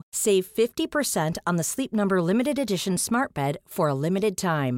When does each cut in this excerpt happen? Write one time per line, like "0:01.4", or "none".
none